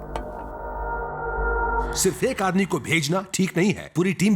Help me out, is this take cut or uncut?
cut